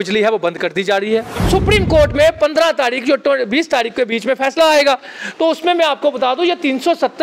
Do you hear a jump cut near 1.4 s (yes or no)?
yes